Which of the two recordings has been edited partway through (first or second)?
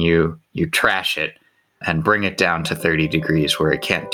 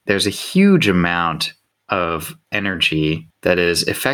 second